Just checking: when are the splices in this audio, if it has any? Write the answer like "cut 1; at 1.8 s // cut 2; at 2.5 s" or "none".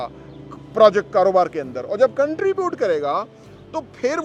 none